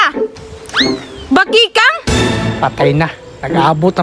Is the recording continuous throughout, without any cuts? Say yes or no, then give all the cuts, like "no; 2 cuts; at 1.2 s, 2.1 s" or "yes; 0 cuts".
yes; 0 cuts